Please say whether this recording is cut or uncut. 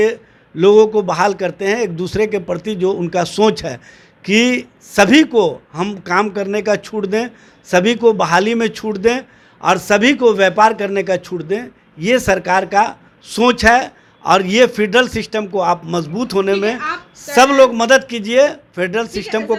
uncut